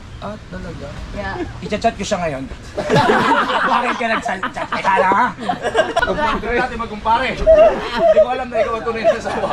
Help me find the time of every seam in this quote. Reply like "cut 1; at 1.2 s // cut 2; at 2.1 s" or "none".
cut 1; at 6.0 s